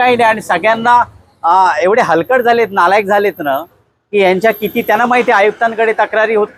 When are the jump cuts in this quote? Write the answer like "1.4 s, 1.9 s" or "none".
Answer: none